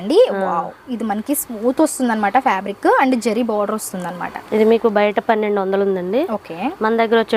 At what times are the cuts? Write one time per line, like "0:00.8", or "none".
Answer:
none